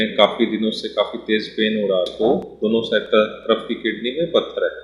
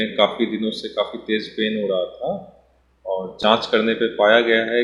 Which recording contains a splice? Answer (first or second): first